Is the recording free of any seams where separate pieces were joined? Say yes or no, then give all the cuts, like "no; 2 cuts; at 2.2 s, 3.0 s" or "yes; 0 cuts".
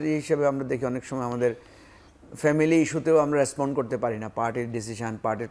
yes; 0 cuts